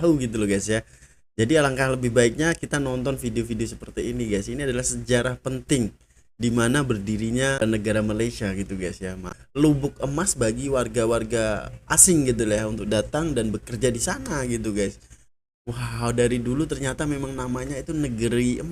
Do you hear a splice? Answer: yes; 2 cuts; at 7.6 s, 9.3 s

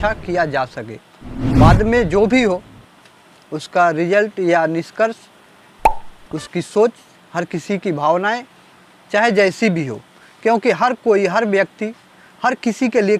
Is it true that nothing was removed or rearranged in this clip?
yes; 0 cuts

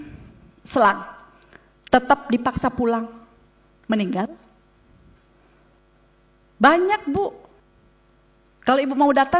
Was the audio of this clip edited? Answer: no; 0 cuts

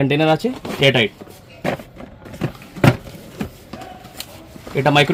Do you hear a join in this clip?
no; 0 cuts

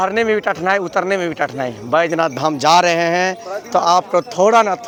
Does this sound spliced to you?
no; 0 cuts

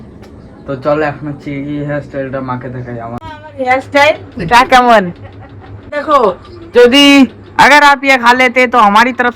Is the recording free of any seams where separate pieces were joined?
no; 2 cuts; at 3.2 s, 5.8 s

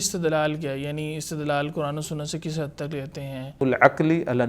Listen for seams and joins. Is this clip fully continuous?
no; 1 cut; at 3.6 s

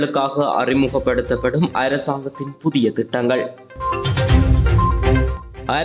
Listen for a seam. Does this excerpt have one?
no; 0 cuts

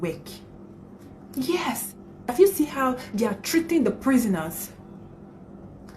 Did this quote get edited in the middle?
yes; 1 cut; at 2.3 s

